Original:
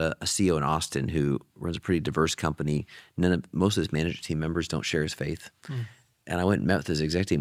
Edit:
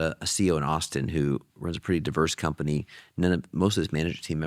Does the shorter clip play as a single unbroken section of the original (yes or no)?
yes